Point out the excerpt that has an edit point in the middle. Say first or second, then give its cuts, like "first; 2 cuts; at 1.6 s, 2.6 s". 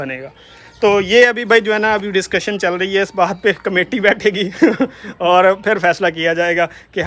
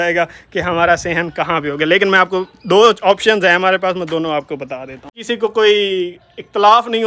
second; 1 cut; at 5.2 s